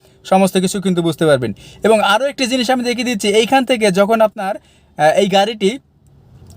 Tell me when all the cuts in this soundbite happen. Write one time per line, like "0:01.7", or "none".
none

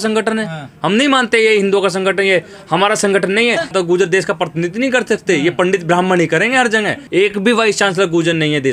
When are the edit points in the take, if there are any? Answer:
0:03.7
0:07.0

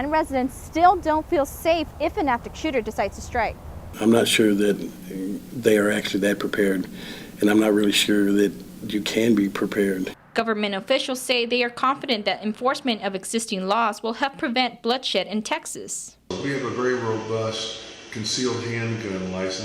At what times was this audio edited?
none

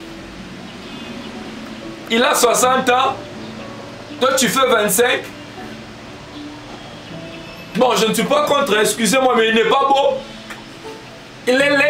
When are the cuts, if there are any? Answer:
none

